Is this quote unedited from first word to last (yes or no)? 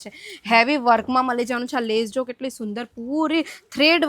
yes